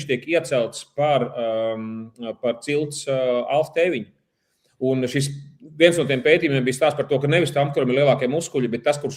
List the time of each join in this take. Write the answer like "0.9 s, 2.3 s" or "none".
none

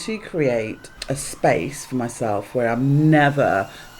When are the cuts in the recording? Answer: 0.9 s

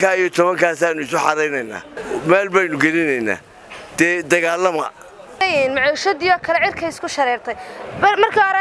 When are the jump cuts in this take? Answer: 2.0 s, 5.4 s

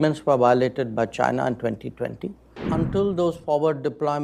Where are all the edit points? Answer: 2.5 s

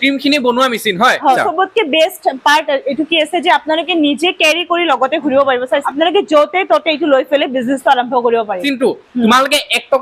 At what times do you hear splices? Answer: 1.4 s, 5.9 s, 8.6 s

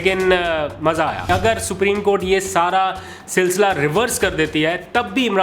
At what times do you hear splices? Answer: 1.2 s

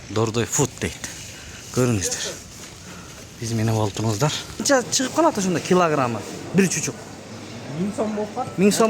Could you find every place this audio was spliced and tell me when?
4.6 s

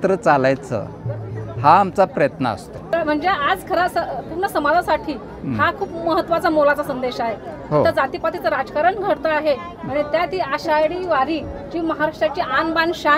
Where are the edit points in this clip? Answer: 2.9 s

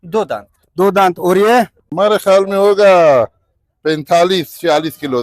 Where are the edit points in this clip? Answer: 1.8 s

